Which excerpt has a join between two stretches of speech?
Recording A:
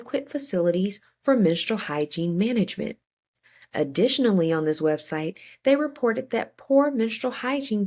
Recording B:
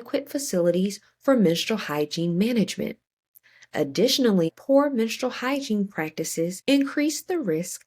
B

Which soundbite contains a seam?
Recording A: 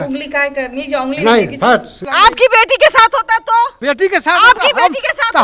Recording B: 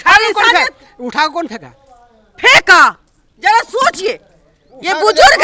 A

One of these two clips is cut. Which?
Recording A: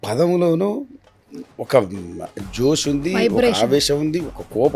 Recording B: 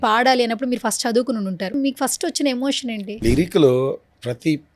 B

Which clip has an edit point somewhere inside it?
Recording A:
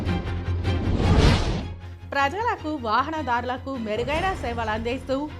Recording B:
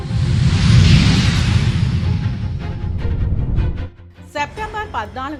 A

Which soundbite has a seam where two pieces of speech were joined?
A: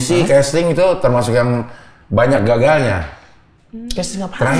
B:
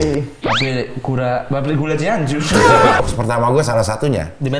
B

